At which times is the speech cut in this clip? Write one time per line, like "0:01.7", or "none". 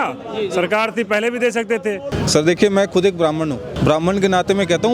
0:02.2
0:03.7